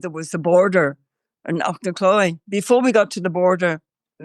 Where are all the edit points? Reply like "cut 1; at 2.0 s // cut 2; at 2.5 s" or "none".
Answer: cut 1; at 2.4 s